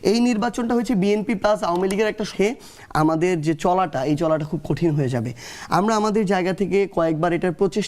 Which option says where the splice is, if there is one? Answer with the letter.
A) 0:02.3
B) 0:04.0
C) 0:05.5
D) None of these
A